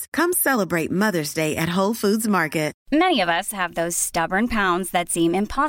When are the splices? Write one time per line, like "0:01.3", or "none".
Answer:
0:02.8